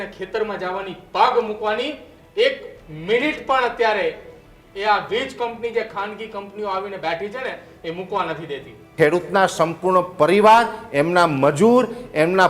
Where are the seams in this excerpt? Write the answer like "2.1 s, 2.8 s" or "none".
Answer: 8.9 s